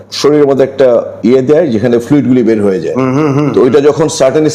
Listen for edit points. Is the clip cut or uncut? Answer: uncut